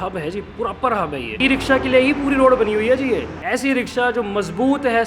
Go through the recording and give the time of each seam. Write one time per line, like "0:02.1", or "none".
0:01.3
0:03.3